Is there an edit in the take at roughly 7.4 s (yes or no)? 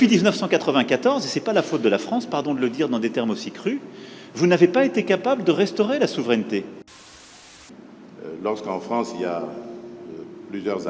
yes